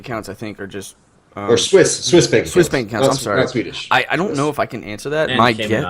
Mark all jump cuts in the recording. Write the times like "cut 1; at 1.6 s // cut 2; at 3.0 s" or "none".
none

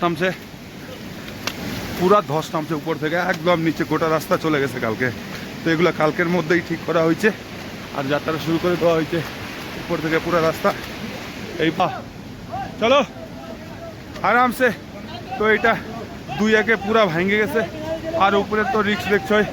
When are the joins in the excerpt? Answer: cut 1; at 11.8 s

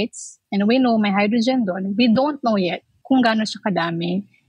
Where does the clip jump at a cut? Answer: cut 1; at 2.9 s

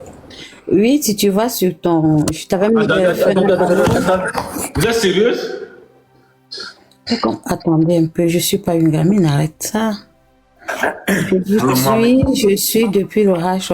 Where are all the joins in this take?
none

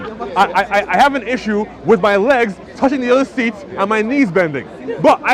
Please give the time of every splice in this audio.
none

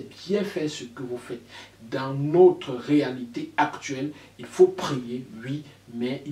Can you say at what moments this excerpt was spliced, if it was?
cut 1; at 1.6 s

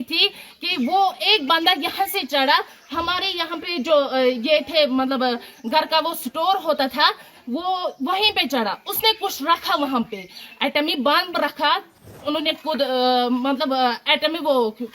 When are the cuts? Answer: cut 1; at 12.1 s

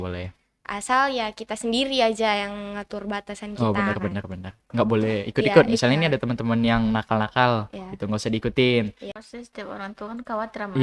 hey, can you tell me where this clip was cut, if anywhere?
cut 1; at 9.1 s

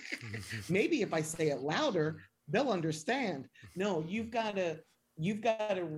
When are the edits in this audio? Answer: none

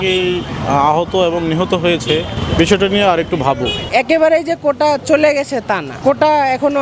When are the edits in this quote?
cut 1; at 2.4 s // cut 2; at 3.8 s // cut 3; at 5.9 s

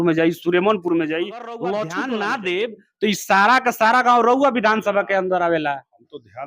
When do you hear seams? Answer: cut 1; at 2.0 s

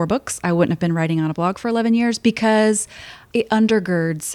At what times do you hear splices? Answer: cut 1; at 3.2 s

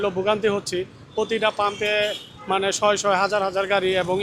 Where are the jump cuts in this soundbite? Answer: none

